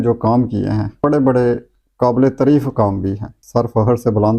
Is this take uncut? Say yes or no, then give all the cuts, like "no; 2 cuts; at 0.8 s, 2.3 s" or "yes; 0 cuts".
no; 2 cuts; at 0.9 s, 3.4 s